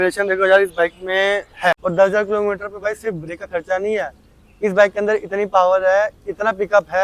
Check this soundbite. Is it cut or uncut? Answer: cut